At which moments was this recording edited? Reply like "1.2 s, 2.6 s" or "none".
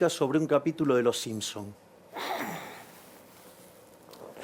none